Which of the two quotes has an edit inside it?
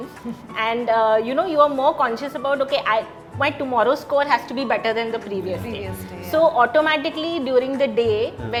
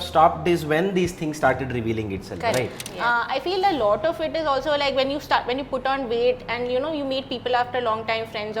second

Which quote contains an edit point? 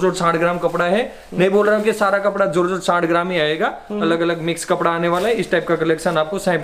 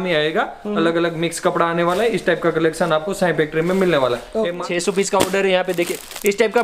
second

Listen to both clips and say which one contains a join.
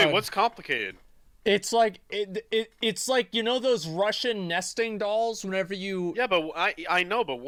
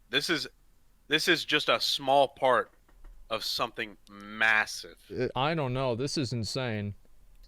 second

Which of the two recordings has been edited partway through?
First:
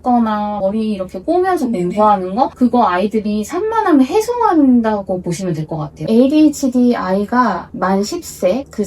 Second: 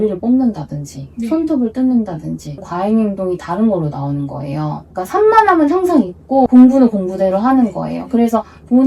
first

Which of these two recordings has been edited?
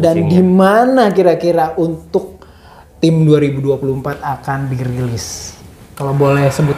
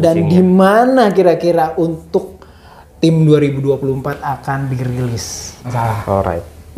second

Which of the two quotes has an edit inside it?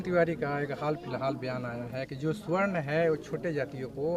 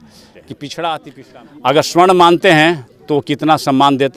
second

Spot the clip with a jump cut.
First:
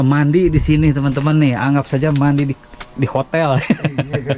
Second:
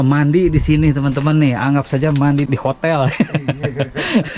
second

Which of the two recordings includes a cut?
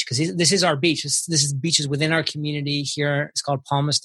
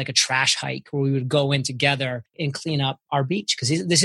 second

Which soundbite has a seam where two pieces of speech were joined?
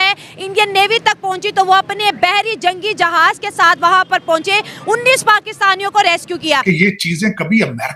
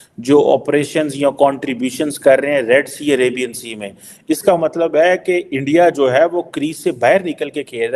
first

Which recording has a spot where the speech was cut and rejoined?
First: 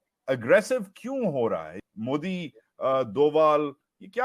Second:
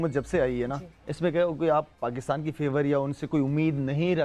first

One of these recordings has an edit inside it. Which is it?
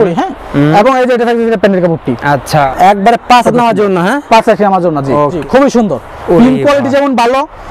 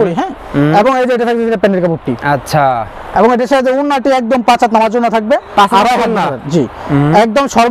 first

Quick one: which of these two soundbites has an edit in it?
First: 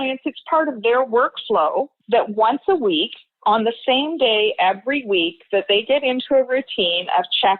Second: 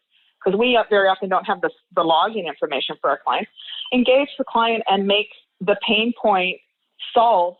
first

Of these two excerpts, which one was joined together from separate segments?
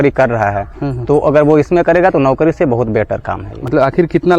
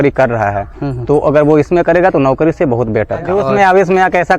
second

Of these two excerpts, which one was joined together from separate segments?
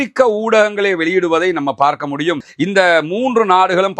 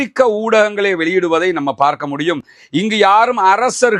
first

